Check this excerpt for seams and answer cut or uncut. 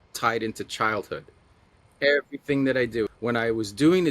cut